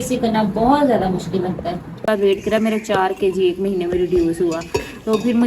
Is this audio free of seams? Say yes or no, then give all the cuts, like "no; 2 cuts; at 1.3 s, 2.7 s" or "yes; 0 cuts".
no; 1 cut; at 2.0 s